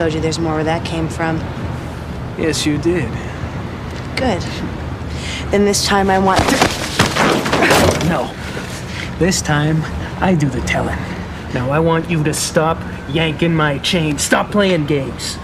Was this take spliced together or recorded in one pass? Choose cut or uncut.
uncut